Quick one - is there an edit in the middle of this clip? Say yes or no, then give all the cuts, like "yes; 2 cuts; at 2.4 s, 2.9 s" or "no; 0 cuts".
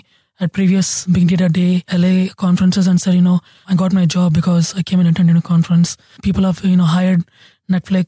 yes; 4 cuts; at 1.0 s, 1.8 s, 3.6 s, 6.2 s